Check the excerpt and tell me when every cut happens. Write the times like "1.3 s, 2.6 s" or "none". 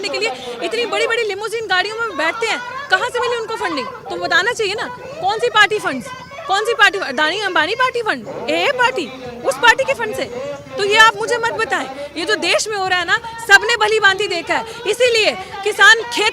none